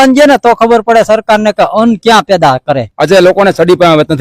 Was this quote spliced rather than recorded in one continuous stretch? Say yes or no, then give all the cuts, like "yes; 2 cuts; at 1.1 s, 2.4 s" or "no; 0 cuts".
yes; 1 cut; at 2.9 s